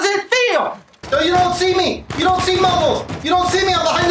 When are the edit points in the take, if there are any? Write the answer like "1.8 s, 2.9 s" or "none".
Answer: 0.9 s